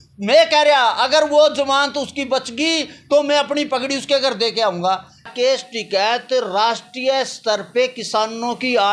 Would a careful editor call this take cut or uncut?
cut